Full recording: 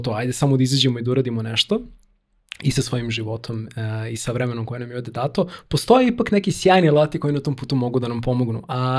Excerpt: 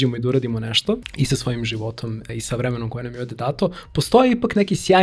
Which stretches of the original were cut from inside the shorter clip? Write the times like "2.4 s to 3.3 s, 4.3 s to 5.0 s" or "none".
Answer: 1.9 s to 2.5 s, 3.7 s to 4.0 s